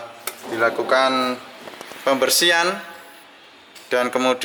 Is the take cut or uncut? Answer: uncut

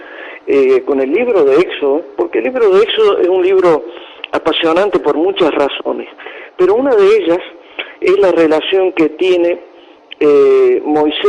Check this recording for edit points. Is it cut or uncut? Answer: uncut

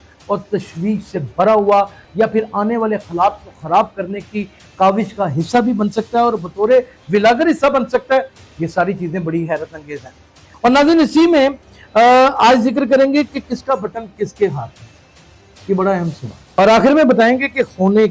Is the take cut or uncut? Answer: cut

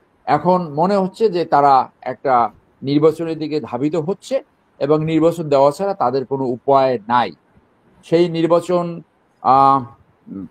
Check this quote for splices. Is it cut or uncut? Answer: uncut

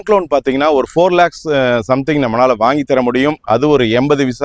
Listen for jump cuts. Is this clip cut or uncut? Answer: uncut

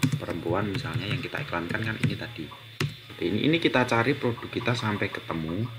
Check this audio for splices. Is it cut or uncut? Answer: cut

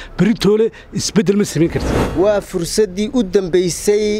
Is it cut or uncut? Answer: cut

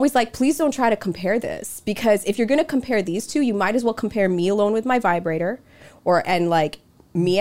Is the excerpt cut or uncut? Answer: uncut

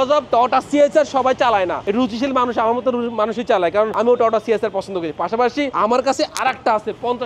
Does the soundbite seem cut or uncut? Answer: uncut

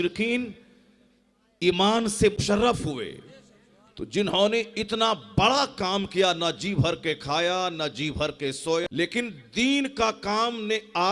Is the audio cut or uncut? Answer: cut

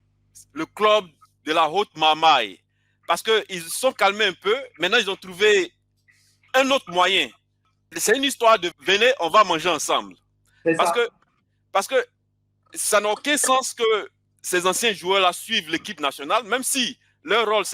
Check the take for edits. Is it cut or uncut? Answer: uncut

